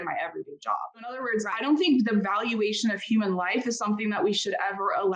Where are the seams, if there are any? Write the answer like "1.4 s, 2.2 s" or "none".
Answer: 1.2 s